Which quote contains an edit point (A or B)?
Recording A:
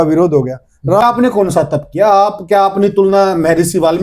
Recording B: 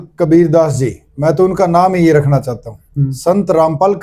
A